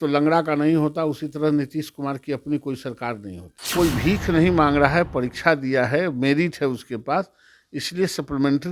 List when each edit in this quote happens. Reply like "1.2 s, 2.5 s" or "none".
3.7 s